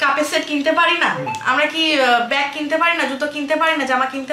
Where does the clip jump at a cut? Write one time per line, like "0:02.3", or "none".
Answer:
none